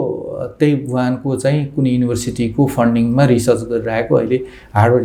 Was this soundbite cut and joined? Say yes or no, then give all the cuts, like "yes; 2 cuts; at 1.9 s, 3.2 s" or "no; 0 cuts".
no; 0 cuts